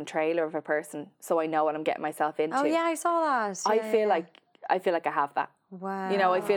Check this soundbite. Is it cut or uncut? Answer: uncut